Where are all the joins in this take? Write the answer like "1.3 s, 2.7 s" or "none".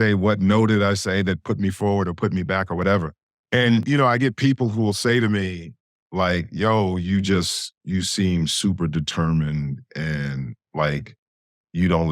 3.8 s